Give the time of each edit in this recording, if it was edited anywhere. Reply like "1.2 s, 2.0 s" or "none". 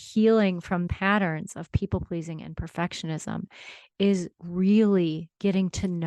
0.9 s